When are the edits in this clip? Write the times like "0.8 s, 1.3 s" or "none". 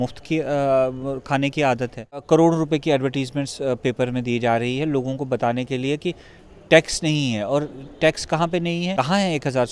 2.2 s, 8.9 s